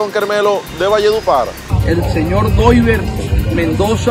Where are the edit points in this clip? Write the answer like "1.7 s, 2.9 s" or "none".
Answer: 1.6 s